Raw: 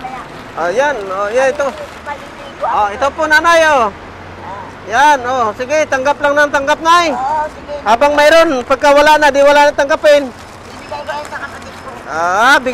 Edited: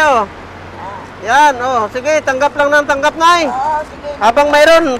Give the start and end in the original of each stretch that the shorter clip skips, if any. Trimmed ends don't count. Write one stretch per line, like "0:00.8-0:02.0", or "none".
none